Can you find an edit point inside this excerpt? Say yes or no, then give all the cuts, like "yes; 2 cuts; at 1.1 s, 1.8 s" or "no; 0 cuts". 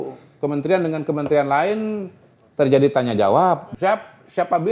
yes; 1 cut; at 3.7 s